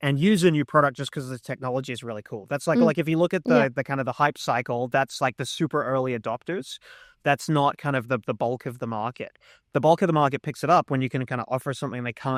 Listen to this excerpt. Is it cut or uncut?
uncut